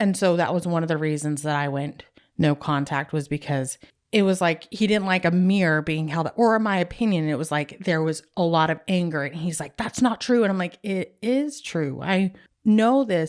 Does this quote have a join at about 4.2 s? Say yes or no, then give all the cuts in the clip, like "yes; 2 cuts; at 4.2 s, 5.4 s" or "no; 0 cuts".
no; 0 cuts